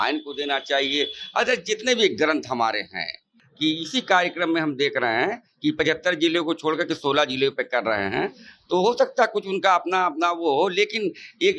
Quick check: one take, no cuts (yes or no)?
no